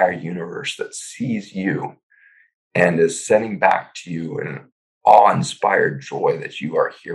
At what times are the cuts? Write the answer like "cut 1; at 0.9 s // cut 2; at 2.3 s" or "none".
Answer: none